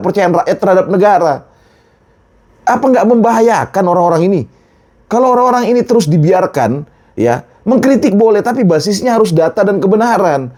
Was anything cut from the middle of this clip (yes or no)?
no